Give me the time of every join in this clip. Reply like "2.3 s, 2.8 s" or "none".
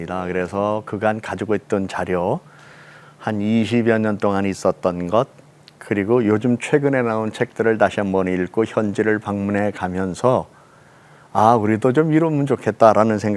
none